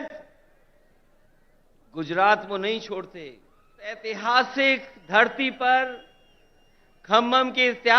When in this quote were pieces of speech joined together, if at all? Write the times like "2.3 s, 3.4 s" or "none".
4.1 s